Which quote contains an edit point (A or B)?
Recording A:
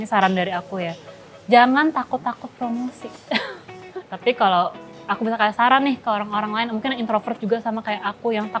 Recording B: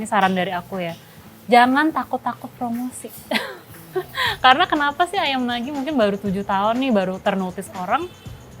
A